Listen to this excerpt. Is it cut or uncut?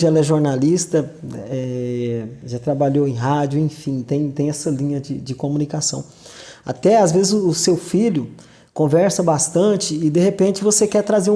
uncut